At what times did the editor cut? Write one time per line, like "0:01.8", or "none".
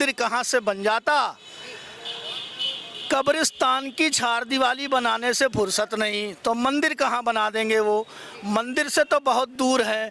none